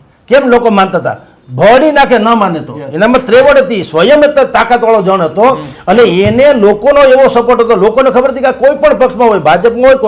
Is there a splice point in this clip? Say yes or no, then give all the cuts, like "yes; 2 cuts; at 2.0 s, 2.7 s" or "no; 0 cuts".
no; 0 cuts